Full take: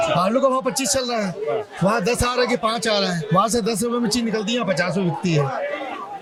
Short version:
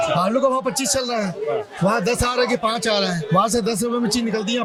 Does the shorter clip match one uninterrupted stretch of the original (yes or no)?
yes